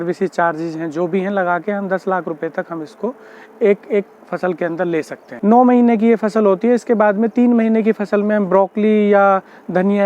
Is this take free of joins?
no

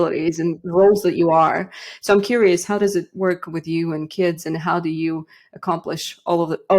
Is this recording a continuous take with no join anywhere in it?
yes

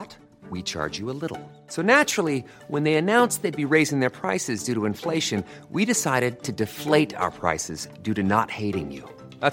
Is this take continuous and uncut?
yes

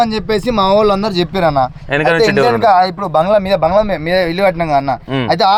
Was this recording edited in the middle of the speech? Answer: no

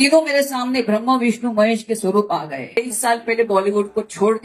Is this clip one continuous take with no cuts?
no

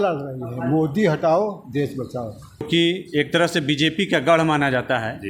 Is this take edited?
yes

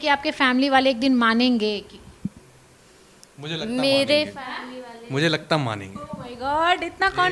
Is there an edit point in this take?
no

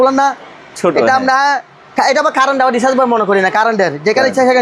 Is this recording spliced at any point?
no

